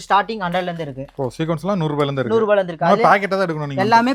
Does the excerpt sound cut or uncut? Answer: uncut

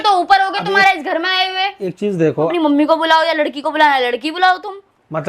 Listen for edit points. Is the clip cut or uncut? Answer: cut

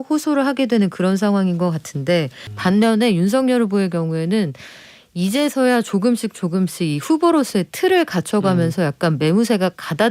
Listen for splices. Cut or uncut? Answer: cut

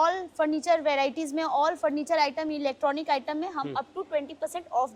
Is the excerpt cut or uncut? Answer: uncut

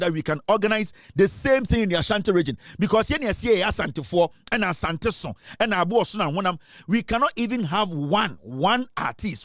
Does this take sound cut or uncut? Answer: uncut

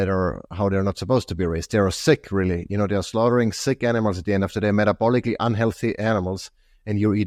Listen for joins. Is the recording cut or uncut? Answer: uncut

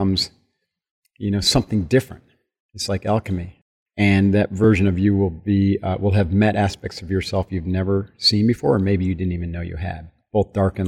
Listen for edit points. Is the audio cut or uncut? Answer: cut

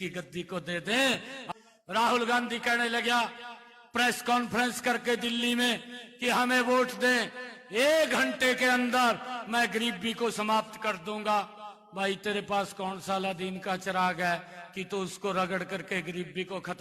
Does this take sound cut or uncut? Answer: cut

